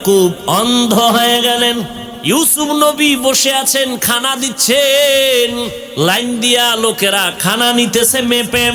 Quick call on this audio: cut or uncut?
cut